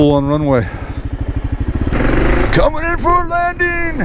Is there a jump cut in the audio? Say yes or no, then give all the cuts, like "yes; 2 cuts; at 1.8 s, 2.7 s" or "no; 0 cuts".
yes; 1 cut; at 1.9 s